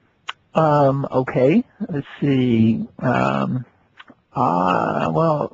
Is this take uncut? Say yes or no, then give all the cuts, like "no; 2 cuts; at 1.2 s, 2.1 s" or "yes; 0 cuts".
no; 1 cut; at 2.0 s